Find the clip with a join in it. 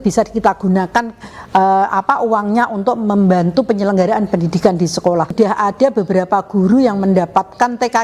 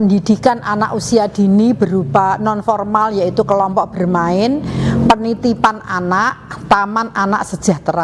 first; 1 cut; at 5.3 s

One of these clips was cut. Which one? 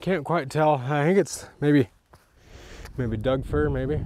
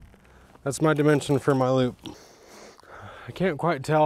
second; 1 cut; at 2.1 s

